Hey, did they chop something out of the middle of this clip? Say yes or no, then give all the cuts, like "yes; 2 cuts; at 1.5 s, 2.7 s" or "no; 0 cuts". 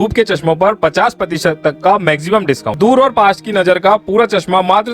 yes; 1 cut; at 2.8 s